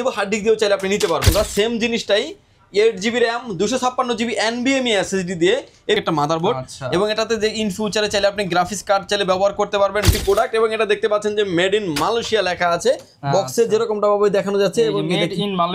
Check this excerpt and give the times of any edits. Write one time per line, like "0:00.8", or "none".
0:01.3
0:06.0
0:10.1